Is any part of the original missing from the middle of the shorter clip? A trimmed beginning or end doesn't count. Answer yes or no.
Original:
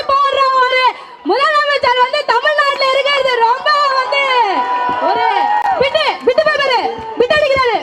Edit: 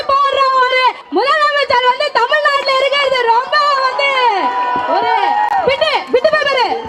yes